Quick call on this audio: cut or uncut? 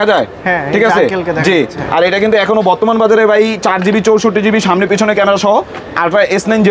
uncut